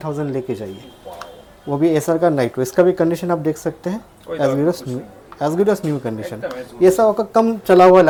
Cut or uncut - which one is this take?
uncut